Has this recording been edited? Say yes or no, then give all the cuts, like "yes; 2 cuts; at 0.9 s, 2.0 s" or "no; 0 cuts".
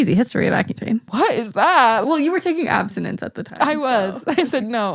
yes; 2 cuts; at 1.1 s, 2.0 s